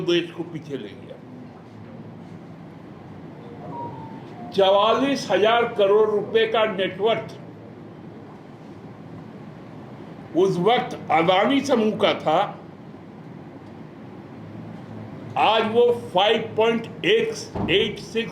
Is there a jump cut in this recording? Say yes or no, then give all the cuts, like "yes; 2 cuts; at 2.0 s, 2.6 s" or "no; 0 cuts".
no; 0 cuts